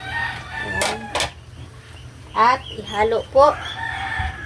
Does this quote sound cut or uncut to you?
uncut